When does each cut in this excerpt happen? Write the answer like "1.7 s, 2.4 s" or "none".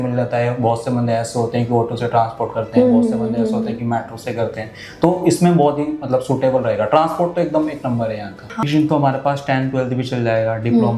8.6 s